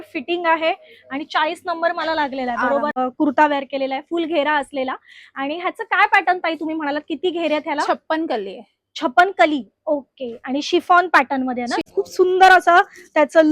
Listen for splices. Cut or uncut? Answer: cut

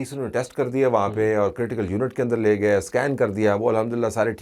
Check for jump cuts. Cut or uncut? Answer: uncut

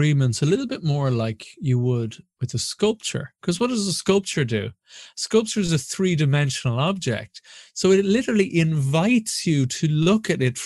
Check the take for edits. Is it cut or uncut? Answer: uncut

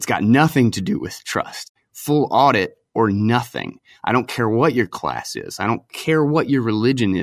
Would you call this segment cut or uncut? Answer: cut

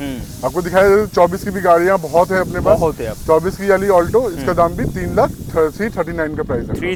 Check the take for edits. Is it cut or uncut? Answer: uncut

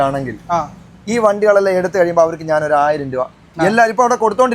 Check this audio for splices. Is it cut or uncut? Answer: uncut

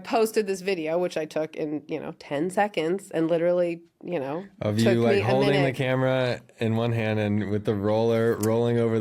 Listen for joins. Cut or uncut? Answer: uncut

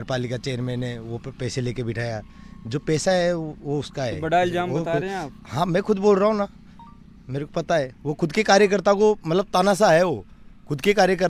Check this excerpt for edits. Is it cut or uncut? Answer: uncut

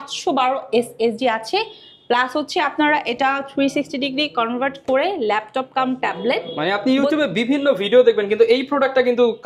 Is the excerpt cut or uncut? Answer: uncut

